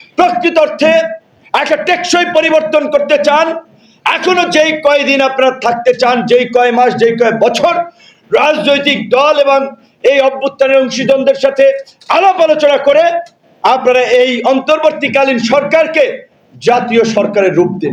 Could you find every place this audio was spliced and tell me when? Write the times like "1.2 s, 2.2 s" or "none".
none